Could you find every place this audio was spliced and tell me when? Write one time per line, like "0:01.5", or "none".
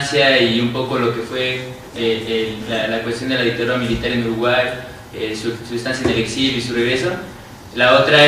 none